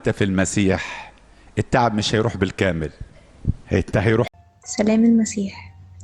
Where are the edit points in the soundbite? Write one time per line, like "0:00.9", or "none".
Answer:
0:04.3